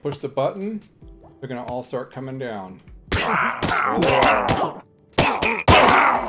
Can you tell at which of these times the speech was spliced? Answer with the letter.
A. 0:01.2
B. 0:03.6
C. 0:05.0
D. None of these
D